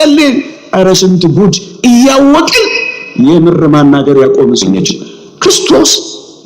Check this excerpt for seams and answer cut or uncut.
cut